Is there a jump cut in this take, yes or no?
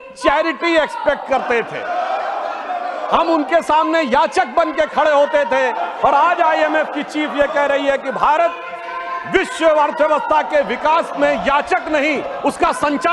no